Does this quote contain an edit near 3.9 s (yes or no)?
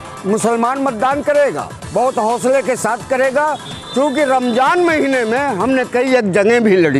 no